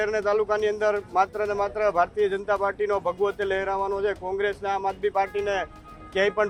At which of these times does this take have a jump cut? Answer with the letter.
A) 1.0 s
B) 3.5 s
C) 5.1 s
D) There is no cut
D